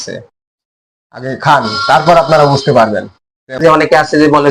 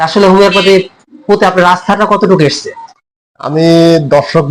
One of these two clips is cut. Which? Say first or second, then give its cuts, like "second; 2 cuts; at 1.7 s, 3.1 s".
first; 1 cut; at 3.6 s